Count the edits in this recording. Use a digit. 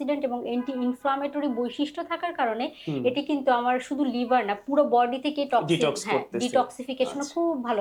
0